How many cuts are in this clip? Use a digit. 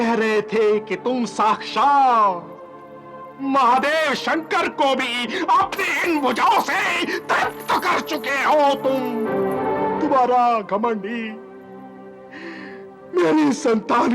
1